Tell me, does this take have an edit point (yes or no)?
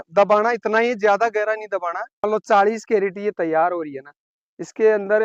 yes